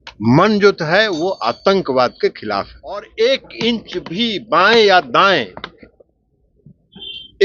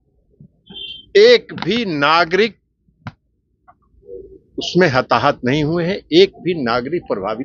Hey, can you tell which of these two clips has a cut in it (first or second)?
first